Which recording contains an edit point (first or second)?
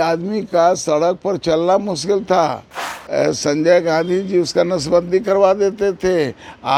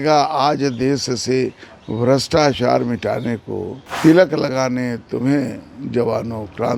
second